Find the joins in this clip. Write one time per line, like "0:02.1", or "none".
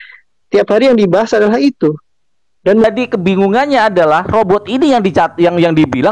0:02.8